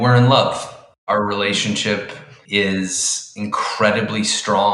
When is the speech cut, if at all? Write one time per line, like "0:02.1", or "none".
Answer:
0:01.0
0:02.4